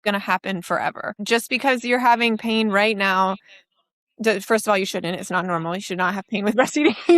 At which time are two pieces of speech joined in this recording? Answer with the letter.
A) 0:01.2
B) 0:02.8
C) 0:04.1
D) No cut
A